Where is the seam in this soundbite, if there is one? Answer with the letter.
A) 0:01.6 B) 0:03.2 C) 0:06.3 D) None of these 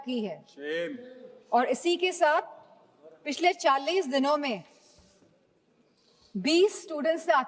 D